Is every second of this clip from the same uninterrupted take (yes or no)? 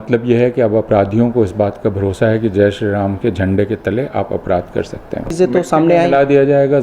no